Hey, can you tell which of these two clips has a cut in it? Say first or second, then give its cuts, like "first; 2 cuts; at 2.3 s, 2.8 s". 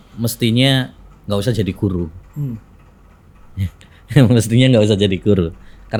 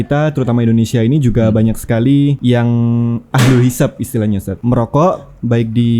second; 2 cuts; at 2.4 s, 4.5 s